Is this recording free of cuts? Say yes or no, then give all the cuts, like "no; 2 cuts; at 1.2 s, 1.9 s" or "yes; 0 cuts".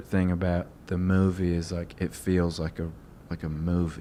yes; 0 cuts